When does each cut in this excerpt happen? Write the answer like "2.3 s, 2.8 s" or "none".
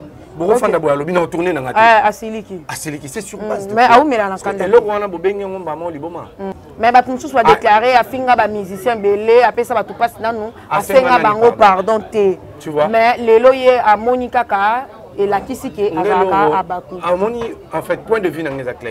6.5 s